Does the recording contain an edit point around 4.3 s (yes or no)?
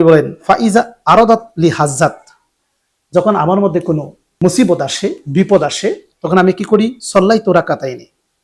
yes